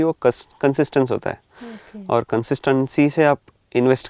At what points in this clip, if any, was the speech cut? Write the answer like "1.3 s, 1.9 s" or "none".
none